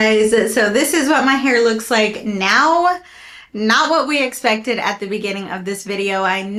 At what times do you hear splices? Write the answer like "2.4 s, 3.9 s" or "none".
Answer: none